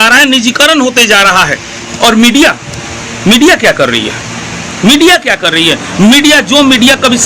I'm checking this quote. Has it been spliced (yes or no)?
yes